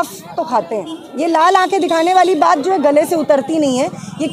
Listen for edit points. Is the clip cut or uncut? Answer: cut